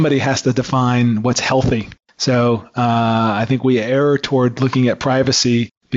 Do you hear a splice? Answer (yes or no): no